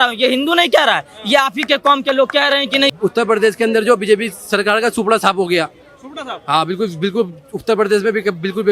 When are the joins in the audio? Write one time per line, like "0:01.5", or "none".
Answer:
0:02.9